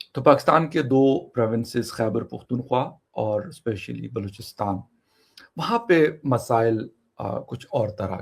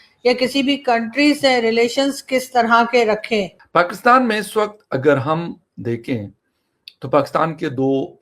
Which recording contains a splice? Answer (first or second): second